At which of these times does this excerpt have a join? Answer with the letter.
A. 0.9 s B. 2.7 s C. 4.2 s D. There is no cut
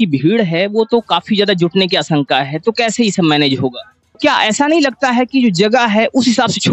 C